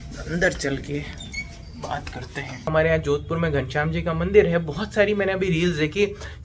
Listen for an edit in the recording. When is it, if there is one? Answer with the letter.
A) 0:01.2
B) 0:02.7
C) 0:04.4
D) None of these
B